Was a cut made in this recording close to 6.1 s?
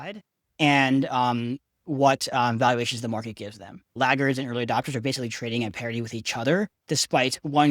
no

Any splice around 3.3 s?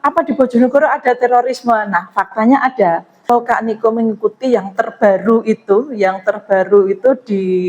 yes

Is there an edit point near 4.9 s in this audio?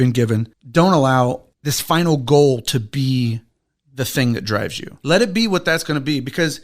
yes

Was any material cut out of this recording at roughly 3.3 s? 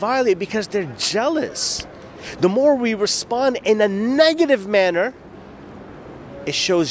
no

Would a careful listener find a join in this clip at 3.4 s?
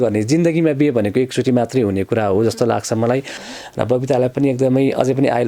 yes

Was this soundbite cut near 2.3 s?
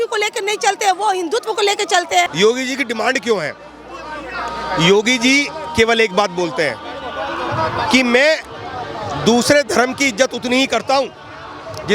yes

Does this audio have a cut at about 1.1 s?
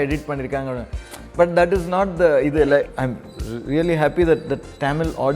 no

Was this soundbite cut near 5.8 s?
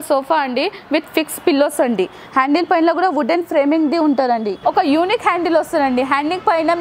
no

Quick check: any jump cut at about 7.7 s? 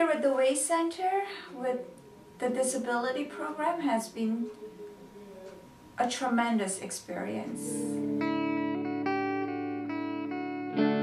yes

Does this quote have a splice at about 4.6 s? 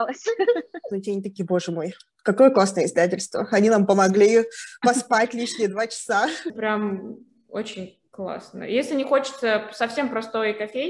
no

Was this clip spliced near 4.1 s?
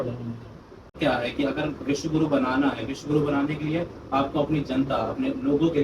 no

